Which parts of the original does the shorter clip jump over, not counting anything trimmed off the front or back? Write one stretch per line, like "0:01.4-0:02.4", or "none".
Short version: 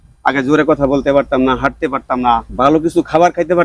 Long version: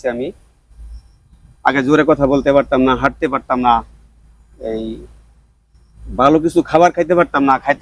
0:03.9-0:06.1